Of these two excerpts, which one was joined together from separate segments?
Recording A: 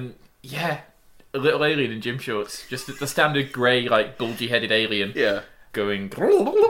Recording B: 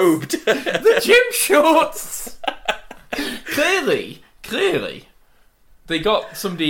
A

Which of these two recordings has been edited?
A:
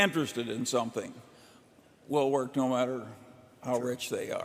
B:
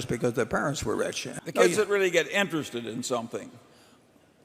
B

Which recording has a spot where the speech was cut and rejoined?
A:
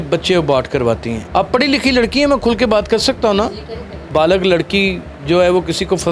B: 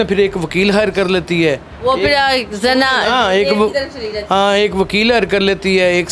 A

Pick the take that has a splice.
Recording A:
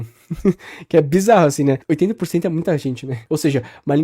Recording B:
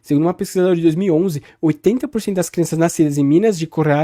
A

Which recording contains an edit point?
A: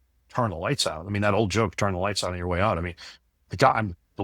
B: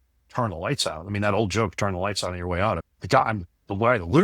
B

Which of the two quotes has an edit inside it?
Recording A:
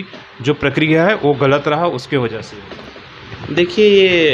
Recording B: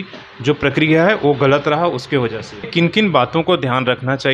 B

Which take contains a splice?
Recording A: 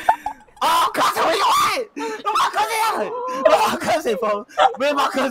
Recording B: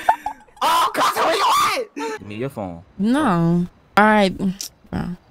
B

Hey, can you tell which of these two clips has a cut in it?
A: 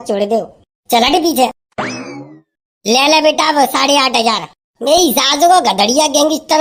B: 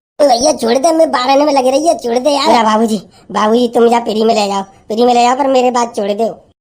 B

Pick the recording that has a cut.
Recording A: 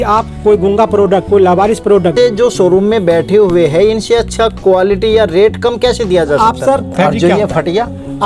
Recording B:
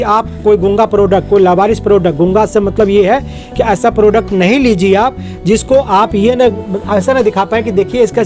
A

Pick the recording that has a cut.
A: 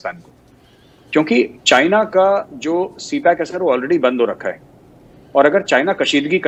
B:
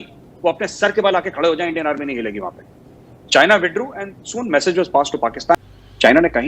B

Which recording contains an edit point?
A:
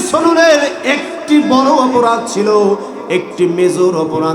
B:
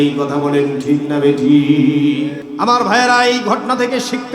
B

